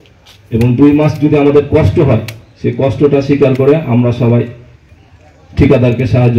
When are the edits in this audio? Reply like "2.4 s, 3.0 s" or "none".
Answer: none